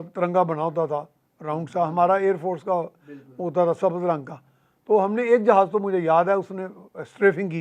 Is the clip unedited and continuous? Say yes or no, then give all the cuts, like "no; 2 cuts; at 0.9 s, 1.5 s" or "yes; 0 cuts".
yes; 0 cuts